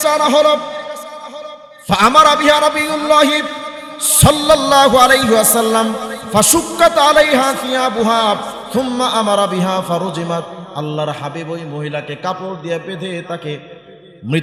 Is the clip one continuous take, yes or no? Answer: yes